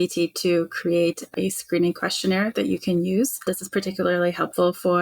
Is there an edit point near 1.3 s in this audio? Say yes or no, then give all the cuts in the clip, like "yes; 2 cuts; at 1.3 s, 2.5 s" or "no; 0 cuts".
yes; 2 cuts; at 1.3 s, 3.4 s